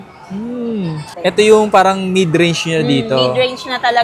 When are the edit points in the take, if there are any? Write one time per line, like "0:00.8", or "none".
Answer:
0:01.0

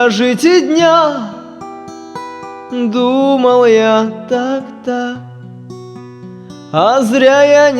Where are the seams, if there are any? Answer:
0:06.7

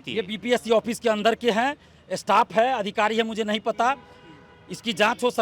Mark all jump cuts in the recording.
none

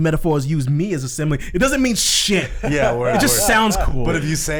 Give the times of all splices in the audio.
none

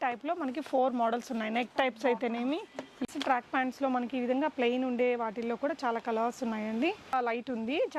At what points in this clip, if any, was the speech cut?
0:02.9
0:07.1

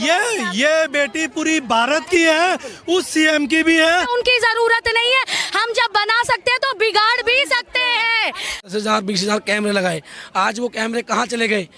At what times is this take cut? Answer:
0:04.1
0:08.7

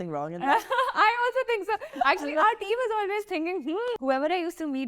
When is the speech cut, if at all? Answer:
0:04.0

